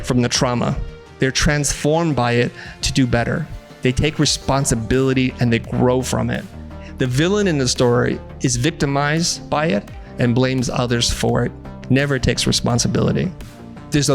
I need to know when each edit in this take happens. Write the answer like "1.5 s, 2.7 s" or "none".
3.6 s